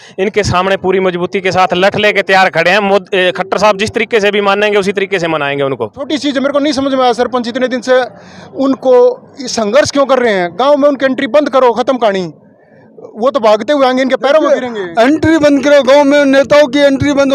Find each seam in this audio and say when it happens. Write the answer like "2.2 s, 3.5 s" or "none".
6.0 s

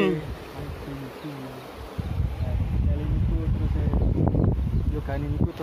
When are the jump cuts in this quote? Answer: none

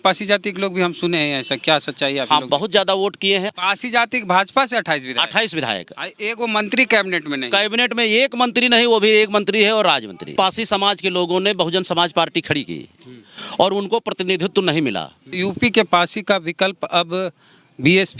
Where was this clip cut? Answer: 3.5 s, 10.3 s, 15.2 s

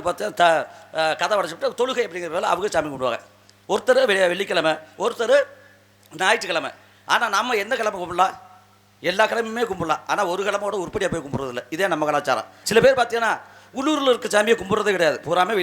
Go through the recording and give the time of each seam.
12.6 s

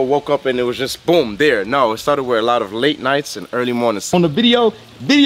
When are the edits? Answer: 4.1 s

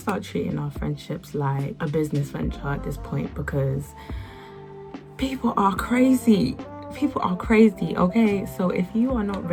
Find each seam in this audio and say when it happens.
none

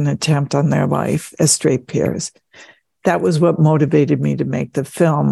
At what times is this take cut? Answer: 1.3 s

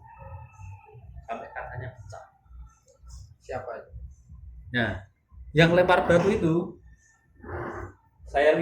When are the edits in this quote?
none

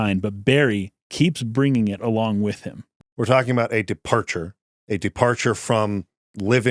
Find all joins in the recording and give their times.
2.9 s

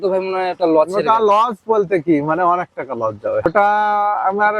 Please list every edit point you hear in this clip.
3.5 s

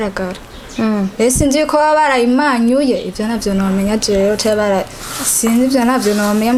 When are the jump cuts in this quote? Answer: none

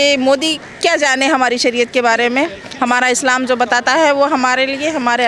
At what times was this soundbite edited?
none

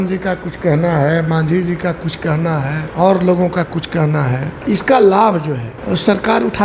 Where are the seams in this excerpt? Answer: 2.9 s, 4.6 s, 5.7 s

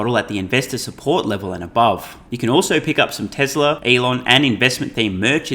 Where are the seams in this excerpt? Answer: 2.2 s, 3.8 s

